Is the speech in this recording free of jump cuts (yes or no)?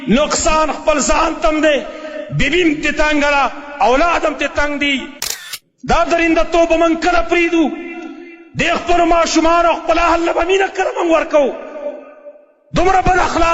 no